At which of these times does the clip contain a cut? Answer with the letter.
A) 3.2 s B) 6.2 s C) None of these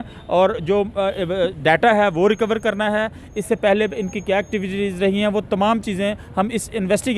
C